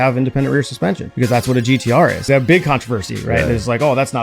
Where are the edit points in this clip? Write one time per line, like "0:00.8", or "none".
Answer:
0:01.1
0:02.2